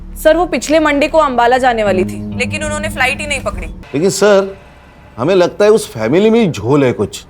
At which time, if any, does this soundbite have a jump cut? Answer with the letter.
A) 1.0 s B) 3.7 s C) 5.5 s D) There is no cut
B